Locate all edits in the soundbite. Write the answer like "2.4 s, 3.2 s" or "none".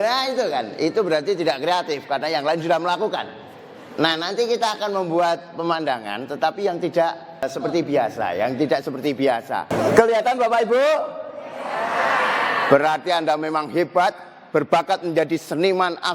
9.7 s